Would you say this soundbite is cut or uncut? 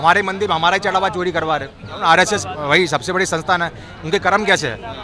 cut